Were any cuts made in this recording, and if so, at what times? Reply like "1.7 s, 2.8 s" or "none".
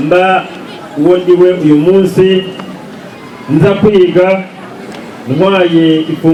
none